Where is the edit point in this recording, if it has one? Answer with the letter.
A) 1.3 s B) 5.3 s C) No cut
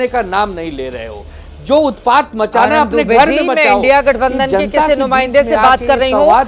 C